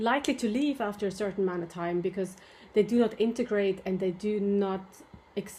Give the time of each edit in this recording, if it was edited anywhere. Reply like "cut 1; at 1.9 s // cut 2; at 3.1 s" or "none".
none